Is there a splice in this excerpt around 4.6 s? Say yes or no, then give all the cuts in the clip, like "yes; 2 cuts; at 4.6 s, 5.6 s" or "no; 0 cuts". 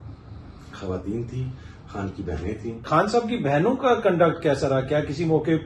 no; 1 cut; at 2.9 s